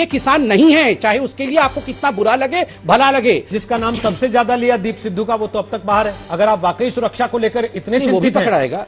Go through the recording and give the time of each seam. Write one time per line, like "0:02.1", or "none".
0:03.6
0:06.2